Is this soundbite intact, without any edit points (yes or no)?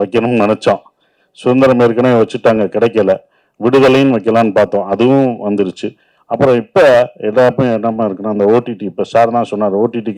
yes